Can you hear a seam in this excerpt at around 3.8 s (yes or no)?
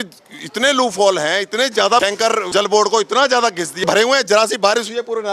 yes